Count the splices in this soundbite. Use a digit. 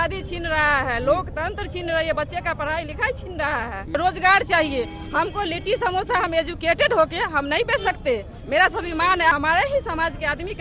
2